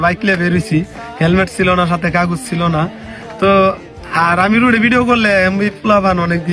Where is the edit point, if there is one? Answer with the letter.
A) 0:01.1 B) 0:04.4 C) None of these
B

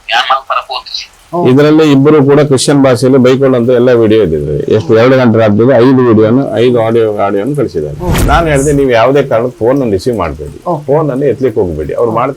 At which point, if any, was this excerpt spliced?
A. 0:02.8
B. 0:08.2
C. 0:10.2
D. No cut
B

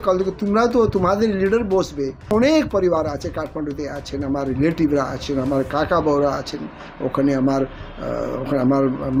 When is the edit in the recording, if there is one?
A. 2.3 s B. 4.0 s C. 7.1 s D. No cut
A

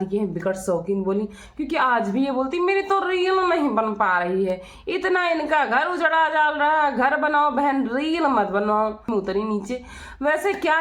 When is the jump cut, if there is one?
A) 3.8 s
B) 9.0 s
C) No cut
B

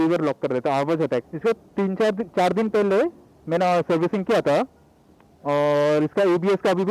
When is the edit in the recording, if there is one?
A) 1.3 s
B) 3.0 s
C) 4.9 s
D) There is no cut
A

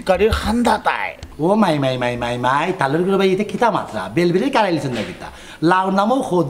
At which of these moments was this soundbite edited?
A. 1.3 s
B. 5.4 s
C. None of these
A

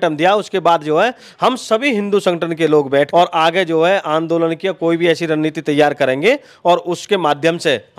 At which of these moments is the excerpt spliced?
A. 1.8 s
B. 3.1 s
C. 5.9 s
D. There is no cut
B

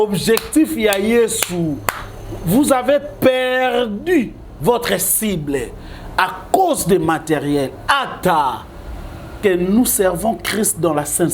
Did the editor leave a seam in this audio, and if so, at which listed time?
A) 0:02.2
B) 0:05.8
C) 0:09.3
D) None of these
C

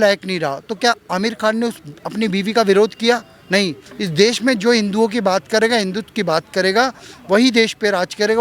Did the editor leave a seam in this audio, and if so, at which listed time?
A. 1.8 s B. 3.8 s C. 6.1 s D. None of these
B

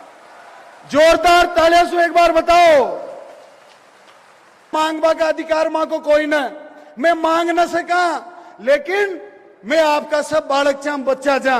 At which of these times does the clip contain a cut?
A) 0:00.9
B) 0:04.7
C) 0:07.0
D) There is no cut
B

